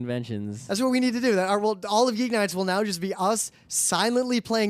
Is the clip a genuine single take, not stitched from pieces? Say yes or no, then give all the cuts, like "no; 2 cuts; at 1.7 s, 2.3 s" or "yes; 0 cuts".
no; 1 cut; at 1.8 s